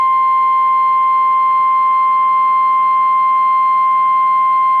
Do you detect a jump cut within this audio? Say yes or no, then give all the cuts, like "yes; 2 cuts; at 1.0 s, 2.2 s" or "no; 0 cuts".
no; 0 cuts